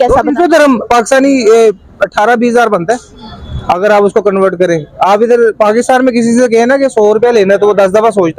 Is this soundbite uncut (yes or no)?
yes